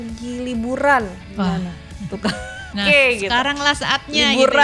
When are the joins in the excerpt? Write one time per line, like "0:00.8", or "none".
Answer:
0:02.7